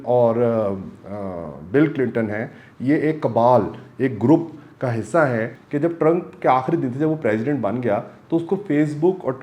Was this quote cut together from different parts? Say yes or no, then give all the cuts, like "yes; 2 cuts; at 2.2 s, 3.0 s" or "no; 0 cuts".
yes; 1 cut; at 5.6 s